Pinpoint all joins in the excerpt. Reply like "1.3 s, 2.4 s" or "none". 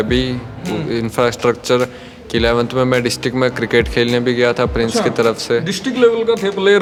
none